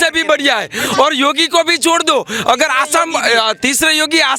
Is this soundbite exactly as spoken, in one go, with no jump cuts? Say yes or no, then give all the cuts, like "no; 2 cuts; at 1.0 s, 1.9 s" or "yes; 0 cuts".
yes; 0 cuts